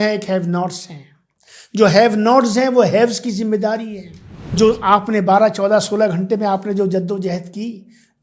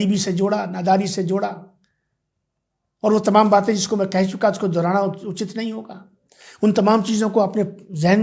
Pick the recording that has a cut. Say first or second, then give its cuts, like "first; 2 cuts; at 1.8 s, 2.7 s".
first; 1 cut; at 4.5 s